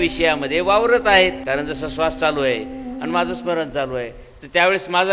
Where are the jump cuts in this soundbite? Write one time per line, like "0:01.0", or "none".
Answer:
0:01.4